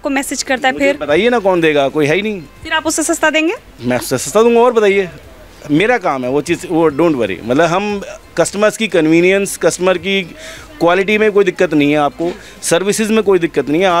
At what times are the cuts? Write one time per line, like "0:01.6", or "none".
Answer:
none